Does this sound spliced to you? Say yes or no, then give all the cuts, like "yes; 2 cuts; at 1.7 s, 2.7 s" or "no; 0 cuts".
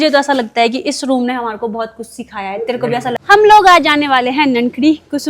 yes; 1 cut; at 3.2 s